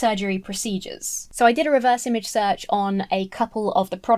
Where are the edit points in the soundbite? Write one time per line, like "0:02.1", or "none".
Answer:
0:01.3